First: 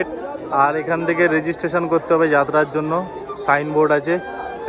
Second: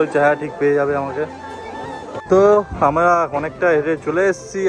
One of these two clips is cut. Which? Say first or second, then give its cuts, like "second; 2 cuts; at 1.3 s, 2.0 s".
second; 1 cut; at 2.2 s